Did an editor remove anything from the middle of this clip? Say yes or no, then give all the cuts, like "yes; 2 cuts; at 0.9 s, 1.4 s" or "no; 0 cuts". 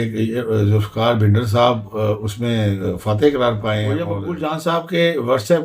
yes; 1 cut; at 4.2 s